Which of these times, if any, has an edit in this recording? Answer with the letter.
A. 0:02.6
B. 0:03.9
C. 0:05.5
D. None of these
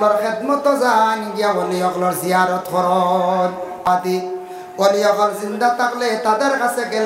B